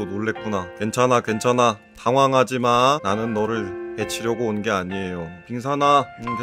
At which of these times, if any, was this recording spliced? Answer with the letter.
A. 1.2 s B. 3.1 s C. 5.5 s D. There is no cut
C